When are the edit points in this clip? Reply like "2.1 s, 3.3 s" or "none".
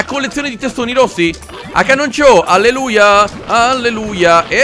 none